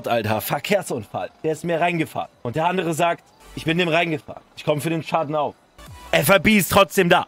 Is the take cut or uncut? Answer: uncut